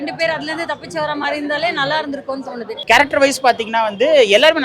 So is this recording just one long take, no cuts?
no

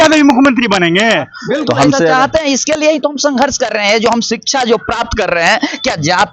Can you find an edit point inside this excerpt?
yes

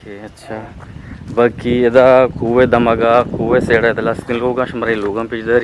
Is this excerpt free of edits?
yes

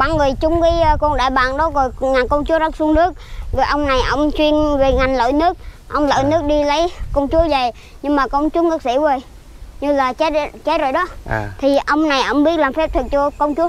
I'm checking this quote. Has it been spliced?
no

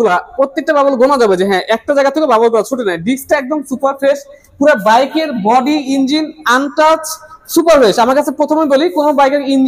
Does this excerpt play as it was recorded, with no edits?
yes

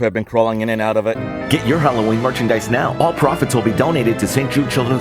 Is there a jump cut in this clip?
yes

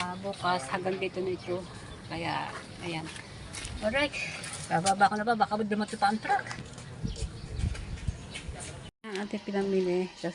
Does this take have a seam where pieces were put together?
yes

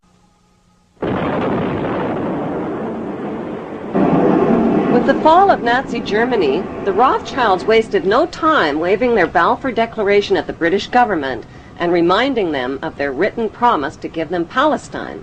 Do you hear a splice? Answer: yes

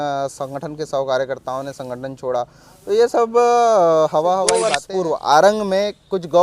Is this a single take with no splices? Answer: no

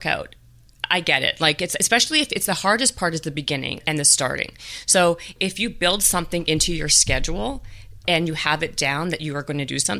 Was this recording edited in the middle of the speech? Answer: no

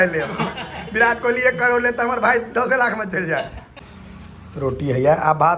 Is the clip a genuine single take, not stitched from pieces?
no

